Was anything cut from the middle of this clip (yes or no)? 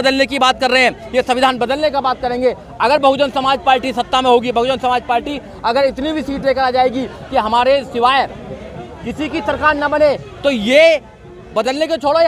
no